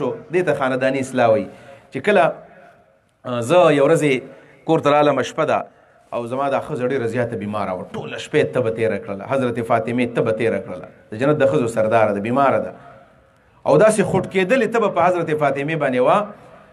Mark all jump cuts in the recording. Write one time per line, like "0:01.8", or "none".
none